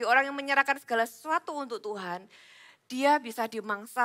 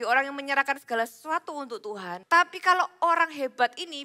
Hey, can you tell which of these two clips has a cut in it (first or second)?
second